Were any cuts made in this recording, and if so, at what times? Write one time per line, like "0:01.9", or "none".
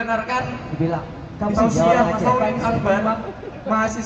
0:02.3

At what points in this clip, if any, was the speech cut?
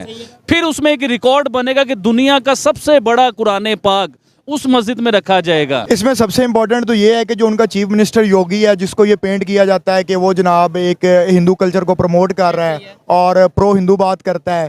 0:05.8

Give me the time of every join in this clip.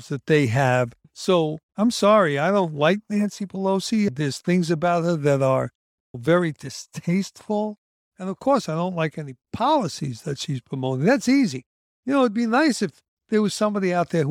0:01.1

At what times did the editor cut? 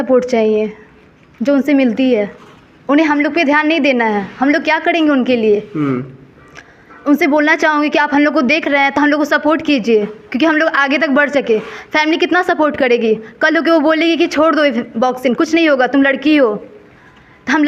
none

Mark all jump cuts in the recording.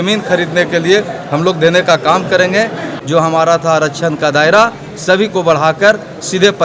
0:02.8

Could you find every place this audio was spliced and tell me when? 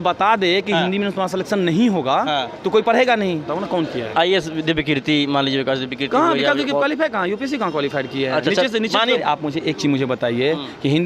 0:03.5
0:09.2

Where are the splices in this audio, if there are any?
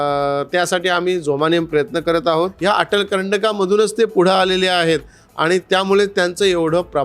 0:02.5

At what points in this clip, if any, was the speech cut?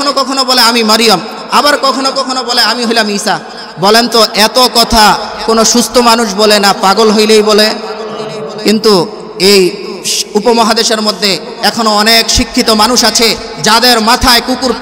none

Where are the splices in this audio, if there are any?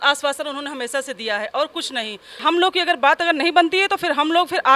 0:02.3

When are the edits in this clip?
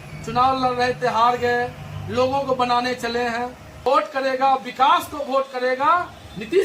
0:03.8

